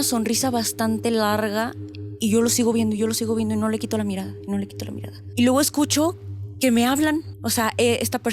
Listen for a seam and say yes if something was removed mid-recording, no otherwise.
yes